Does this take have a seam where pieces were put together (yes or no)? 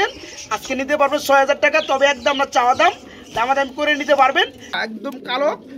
yes